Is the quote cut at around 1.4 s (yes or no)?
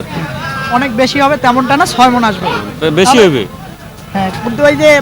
no